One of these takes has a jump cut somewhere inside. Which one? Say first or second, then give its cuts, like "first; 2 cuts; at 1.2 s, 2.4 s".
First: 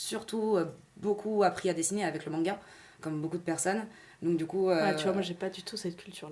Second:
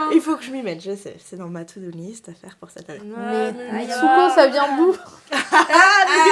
second; 1 cut; at 3.0 s